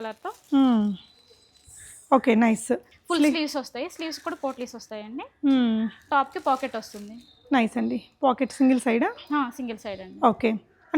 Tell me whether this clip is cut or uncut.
uncut